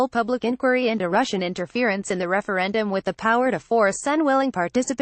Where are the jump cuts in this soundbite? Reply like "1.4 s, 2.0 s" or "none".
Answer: 1.4 s, 2.1 s